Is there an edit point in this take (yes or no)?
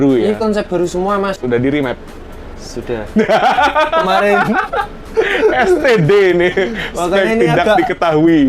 yes